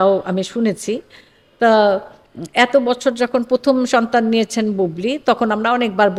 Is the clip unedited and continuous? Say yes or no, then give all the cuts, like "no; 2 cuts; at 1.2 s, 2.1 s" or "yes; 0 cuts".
yes; 0 cuts